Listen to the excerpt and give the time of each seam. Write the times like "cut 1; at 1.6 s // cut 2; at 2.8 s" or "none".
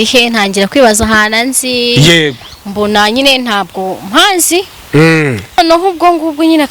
cut 1; at 5.6 s